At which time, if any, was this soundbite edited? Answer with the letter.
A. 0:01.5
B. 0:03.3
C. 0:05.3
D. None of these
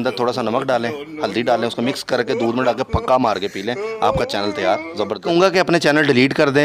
C